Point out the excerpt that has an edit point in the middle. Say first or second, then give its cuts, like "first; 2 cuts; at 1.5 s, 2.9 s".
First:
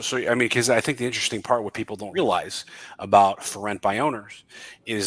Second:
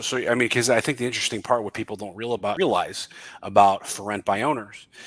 first; 1 cut; at 2.1 s